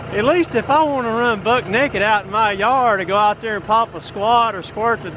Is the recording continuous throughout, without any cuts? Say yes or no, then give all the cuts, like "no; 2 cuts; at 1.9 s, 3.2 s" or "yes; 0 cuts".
yes; 0 cuts